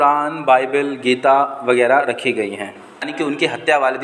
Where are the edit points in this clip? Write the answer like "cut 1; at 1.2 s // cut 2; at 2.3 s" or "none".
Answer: cut 1; at 3.1 s